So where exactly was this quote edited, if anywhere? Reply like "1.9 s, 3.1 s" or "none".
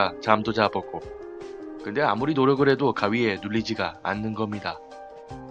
1.1 s

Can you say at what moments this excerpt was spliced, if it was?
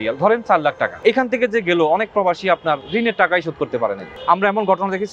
1.0 s, 4.1 s

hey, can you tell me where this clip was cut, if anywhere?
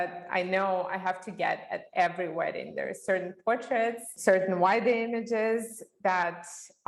4.1 s

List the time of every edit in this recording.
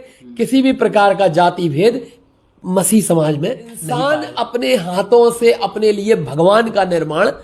3.8 s

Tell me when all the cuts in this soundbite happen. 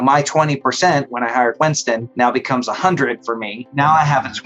2.1 s, 3.7 s

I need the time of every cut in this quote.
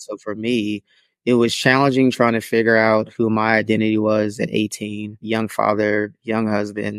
5.2 s

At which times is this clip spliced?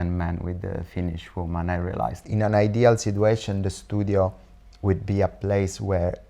2.2 s

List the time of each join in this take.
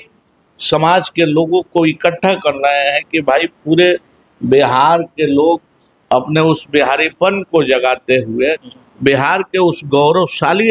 none

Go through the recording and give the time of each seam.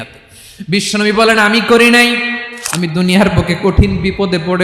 2.4 s

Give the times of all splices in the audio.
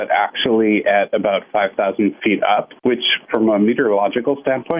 2.7 s

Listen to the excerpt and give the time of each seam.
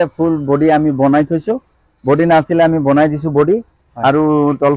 none

